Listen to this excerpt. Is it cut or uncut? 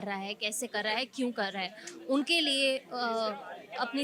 uncut